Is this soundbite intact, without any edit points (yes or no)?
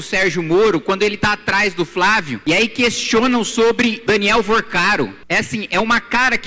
no